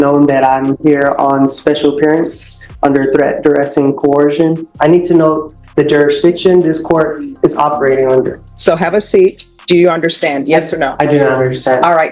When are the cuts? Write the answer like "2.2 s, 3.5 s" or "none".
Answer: 4.7 s, 8.4 s, 9.5 s